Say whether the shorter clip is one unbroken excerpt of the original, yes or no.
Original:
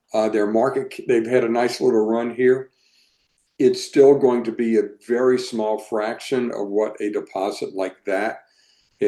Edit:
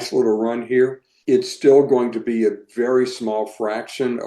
no